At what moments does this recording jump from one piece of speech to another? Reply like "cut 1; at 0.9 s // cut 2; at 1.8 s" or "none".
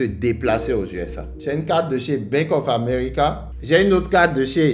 cut 1; at 1.3 s